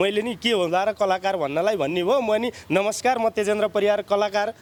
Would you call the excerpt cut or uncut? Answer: uncut